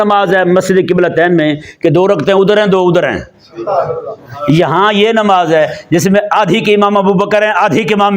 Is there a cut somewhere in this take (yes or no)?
no